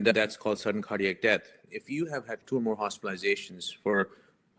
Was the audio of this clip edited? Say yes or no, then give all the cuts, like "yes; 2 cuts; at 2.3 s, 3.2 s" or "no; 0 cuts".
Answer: yes; 1 cut; at 1.6 s